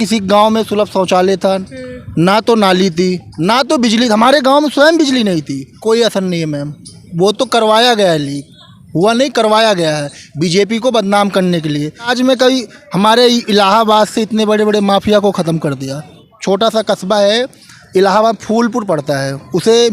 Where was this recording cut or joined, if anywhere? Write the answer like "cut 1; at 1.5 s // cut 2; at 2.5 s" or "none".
cut 1; at 5.6 s // cut 2; at 12.1 s // cut 3; at 16.2 s